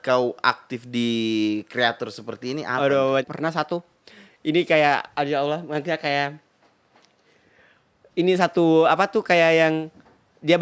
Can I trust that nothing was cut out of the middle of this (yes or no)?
no